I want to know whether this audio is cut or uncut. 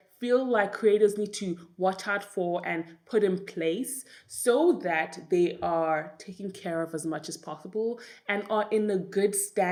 uncut